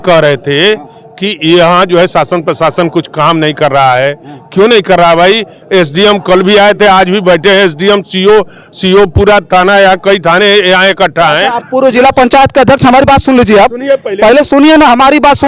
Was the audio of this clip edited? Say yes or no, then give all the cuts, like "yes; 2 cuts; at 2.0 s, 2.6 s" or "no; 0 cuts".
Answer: no; 0 cuts